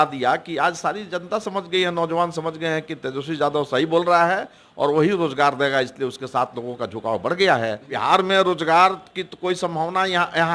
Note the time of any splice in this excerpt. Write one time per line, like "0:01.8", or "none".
0:07.8